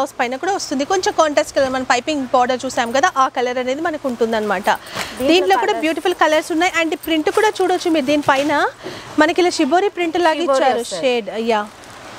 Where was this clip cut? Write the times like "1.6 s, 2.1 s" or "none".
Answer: none